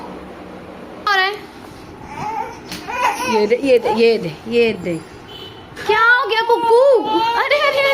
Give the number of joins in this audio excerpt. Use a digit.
1